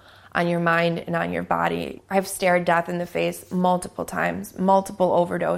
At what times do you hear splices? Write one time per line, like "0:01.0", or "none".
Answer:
0:01.9